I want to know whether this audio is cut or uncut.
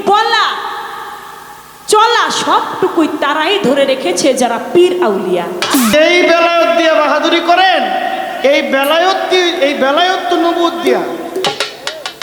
cut